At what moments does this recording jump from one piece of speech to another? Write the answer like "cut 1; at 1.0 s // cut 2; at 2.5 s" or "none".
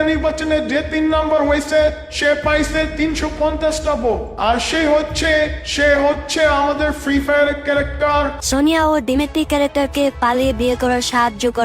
cut 1; at 8.4 s